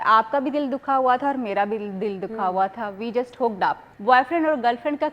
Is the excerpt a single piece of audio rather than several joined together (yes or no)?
no